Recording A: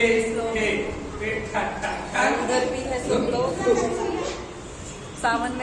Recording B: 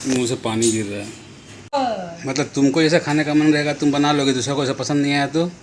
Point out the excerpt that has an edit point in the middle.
B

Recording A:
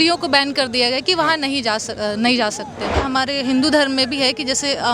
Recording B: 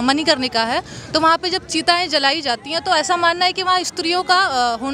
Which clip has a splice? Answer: A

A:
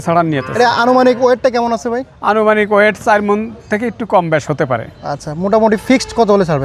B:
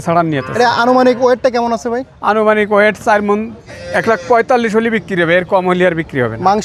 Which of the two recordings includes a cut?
B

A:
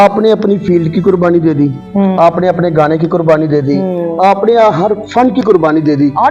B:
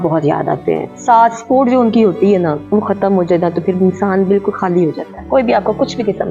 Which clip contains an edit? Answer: B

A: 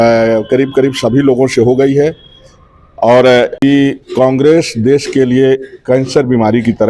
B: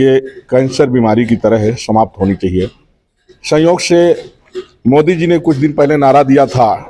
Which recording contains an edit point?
A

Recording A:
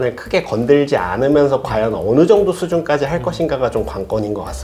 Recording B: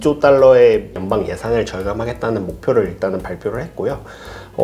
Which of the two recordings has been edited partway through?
B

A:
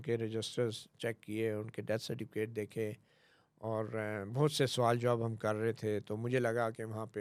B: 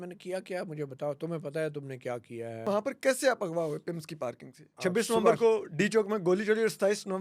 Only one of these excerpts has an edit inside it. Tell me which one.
B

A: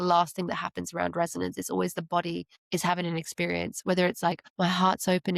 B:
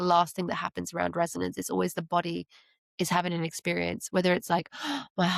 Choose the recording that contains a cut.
A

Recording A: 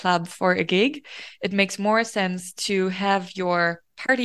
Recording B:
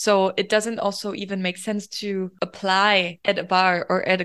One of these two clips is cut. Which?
B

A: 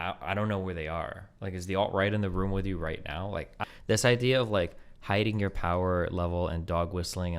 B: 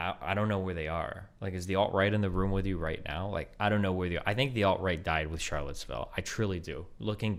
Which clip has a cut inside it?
A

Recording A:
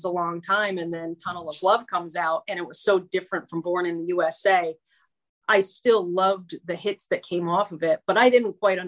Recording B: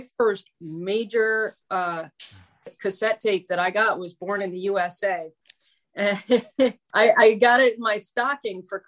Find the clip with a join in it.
B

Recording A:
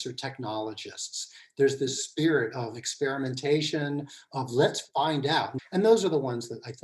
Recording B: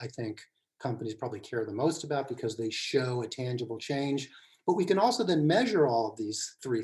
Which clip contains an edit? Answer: A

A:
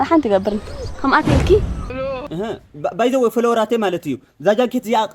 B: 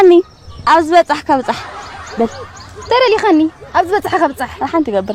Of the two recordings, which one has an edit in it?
A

